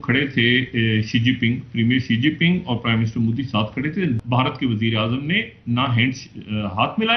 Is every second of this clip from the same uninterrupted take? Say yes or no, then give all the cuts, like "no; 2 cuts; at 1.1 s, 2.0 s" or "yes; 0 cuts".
no; 1 cut; at 4.2 s